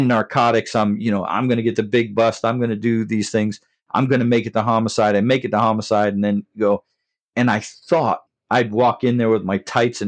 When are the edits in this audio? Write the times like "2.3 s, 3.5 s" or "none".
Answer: 8.3 s